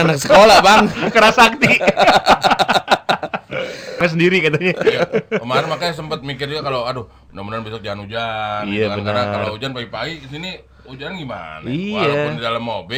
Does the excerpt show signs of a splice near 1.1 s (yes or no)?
no